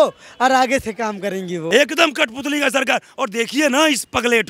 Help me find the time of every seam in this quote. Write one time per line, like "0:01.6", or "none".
0:01.7

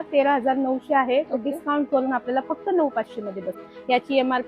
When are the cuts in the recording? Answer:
0:03.5

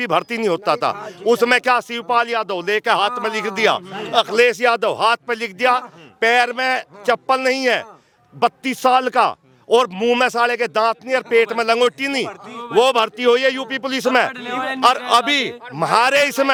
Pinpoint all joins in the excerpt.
none

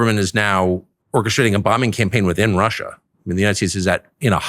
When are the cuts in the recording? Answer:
0:00.9

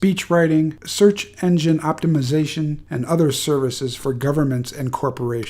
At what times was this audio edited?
0:03.7

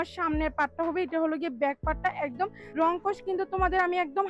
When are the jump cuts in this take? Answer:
0:02.6

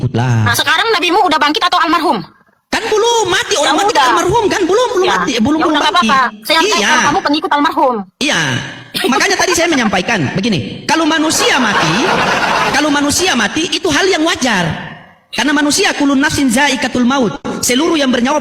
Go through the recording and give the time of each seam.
none

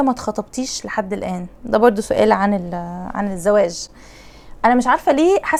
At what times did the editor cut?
none

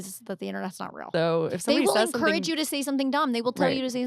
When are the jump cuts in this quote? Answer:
0:01.1

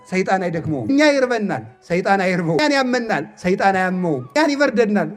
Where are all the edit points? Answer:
0:00.9
0:02.6
0:04.4

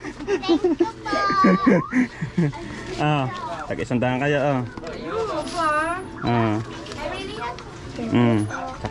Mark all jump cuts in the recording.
none

